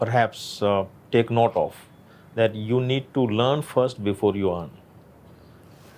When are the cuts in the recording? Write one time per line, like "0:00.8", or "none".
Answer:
none